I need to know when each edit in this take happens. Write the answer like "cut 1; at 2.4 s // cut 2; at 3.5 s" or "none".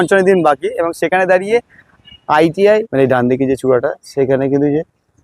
cut 1; at 2.9 s